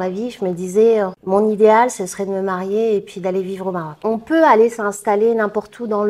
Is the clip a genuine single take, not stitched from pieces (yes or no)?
no